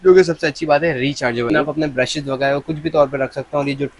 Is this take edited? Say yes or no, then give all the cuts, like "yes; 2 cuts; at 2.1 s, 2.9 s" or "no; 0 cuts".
yes; 1 cut; at 1.5 s